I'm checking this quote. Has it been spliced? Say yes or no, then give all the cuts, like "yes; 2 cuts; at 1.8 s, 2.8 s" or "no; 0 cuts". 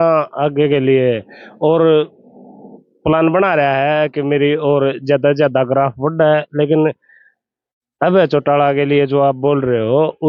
no; 0 cuts